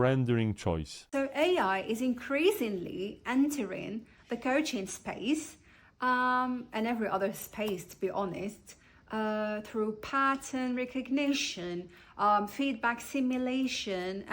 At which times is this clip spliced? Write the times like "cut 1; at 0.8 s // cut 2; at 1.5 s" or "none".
cut 1; at 0.9 s